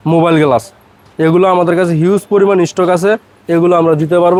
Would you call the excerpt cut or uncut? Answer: uncut